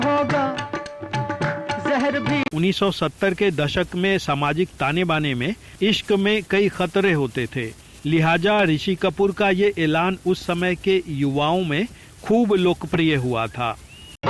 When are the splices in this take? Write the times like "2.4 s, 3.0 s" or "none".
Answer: 2.5 s